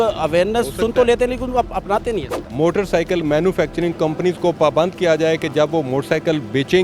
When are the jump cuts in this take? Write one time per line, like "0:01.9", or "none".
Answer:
0:02.4